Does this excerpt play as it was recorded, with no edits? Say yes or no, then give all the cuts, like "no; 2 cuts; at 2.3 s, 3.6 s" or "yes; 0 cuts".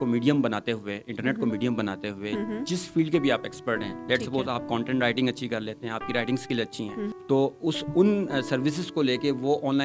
no; 1 cut; at 7.2 s